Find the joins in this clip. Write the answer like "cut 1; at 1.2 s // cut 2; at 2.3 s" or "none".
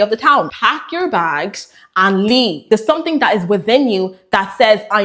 none